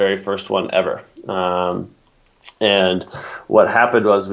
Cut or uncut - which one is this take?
uncut